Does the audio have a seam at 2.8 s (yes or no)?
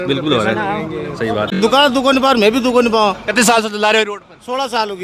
no